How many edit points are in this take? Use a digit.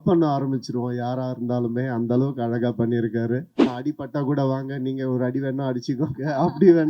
1